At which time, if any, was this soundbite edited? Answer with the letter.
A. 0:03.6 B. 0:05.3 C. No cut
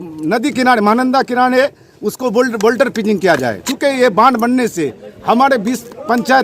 A